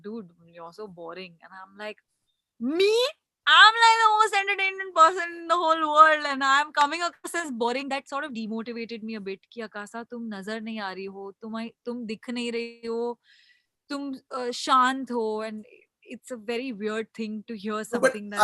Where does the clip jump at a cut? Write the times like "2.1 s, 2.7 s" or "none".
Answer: none

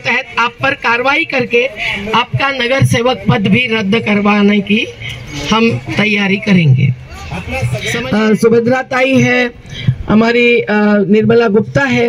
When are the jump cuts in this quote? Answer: 7.8 s

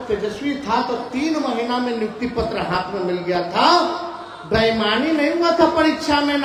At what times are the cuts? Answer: none

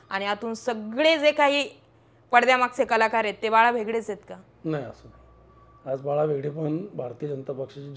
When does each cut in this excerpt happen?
none

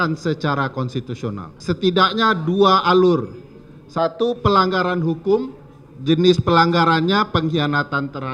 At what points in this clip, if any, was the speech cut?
1.5 s

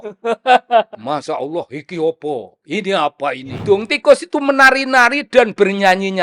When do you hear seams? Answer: 3.5 s

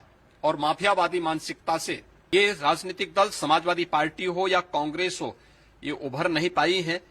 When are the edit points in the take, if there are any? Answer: 2.1 s

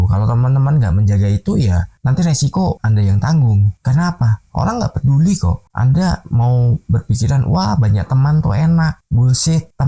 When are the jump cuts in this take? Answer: none

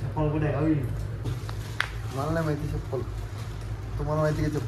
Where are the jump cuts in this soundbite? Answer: 1.3 s

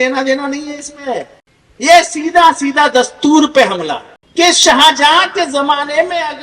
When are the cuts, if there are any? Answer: 4.2 s

